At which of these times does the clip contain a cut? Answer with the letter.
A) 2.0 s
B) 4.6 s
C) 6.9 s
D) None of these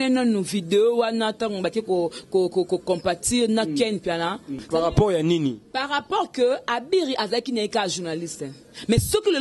B